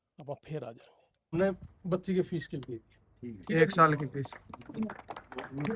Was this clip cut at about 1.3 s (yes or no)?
yes